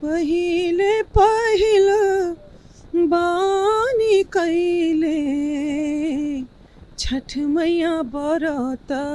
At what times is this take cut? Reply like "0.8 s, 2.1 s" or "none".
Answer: none